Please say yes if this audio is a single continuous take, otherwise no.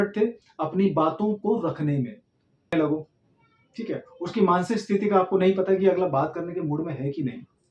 no